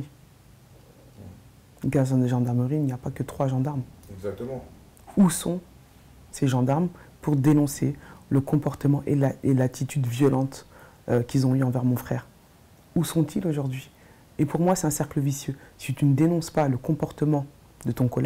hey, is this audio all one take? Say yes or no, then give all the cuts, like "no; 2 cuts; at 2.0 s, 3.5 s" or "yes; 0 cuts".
yes; 0 cuts